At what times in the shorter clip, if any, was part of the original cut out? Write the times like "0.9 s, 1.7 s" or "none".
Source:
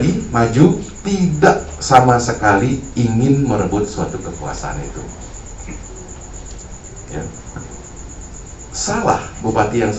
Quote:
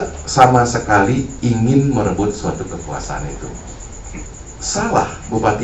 4.3 s

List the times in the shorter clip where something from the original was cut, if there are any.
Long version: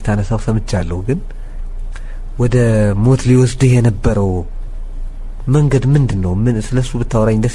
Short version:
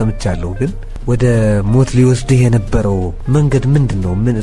0.9 s, 3.2 s

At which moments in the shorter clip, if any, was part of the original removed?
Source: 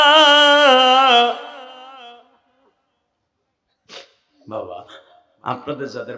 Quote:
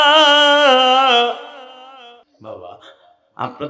2.3 s

